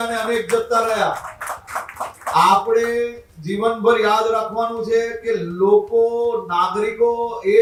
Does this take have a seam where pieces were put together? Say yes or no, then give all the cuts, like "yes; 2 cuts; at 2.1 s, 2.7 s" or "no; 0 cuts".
no; 0 cuts